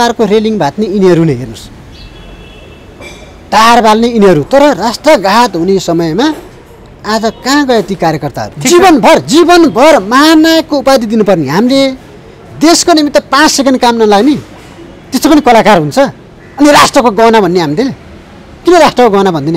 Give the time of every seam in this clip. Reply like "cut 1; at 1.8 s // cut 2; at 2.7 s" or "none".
cut 1; at 8.5 s